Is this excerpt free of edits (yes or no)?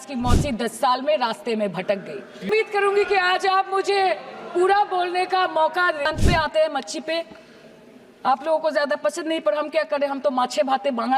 no